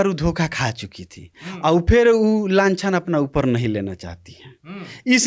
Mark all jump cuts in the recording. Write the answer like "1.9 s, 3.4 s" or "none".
none